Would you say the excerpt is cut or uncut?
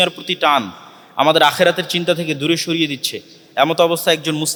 uncut